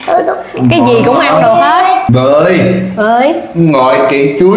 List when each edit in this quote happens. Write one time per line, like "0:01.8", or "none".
0:02.0